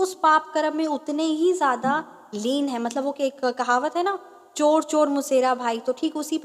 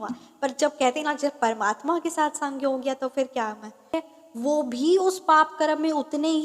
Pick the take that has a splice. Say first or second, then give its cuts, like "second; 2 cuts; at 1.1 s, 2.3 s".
second; 1 cut; at 3.9 s